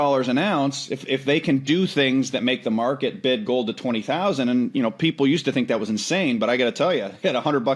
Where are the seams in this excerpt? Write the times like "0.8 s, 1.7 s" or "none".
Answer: none